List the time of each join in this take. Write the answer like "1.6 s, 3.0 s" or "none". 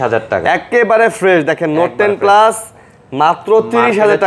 none